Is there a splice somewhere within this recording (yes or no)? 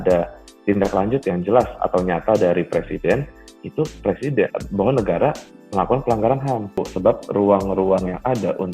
yes